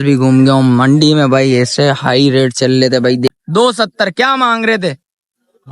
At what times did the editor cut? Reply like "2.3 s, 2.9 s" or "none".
3.3 s